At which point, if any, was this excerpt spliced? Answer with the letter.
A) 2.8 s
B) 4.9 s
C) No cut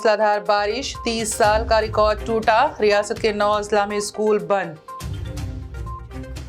C